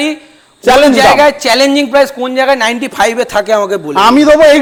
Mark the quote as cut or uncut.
uncut